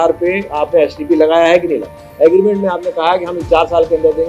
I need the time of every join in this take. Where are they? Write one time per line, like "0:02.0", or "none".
0:02.0